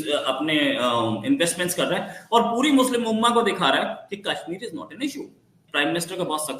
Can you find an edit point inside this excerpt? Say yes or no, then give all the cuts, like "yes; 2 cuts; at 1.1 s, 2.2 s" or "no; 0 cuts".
yes; 1 cut; at 5.6 s